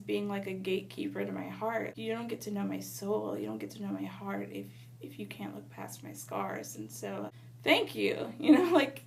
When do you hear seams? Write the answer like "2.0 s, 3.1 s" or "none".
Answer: 1.9 s, 7.4 s